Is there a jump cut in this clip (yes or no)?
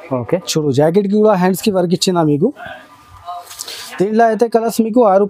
no